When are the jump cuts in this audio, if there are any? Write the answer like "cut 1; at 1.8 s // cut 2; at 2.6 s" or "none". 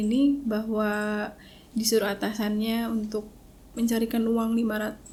none